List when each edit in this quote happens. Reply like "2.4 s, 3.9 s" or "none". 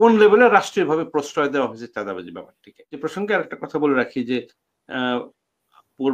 2.9 s